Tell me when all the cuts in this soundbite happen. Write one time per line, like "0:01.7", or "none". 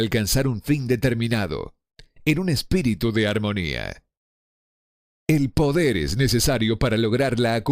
0:02.1